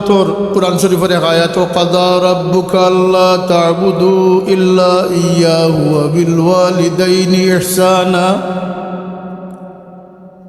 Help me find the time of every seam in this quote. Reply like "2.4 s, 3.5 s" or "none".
none